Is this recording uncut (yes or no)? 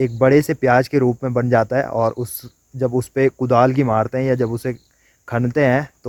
yes